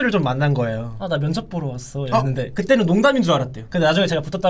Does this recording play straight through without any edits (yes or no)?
no